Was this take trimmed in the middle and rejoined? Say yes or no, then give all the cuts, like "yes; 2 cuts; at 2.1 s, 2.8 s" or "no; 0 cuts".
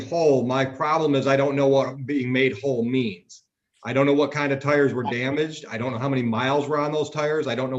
no; 0 cuts